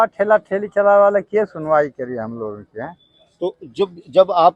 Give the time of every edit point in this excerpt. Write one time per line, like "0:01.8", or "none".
none